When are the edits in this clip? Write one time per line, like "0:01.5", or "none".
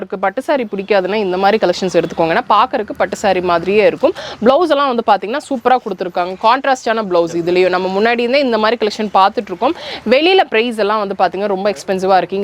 none

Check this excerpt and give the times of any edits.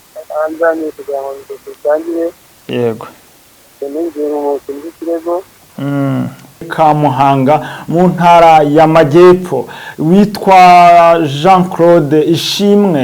0:06.7

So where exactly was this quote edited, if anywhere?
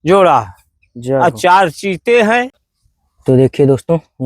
0:02.5

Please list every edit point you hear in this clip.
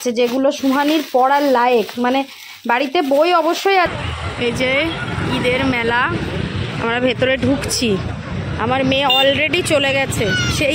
0:03.9

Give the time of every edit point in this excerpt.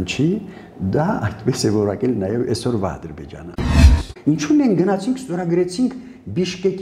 0:03.8

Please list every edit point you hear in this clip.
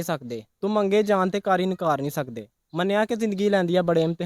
none

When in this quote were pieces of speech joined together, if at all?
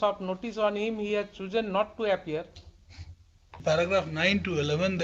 0:03.4

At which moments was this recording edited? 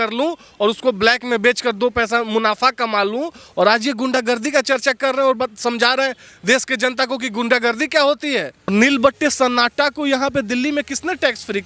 0:08.7

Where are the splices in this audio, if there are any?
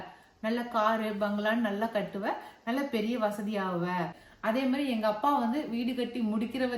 0:04.2

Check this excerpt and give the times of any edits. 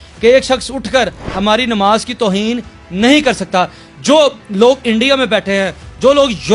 none

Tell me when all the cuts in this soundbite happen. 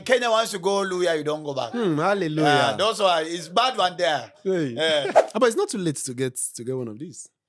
0:05.2

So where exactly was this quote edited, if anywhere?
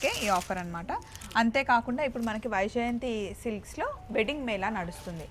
none

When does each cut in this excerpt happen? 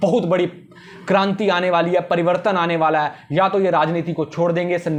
none

